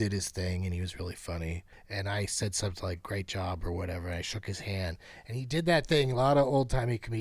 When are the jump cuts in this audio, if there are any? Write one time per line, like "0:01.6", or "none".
0:01.7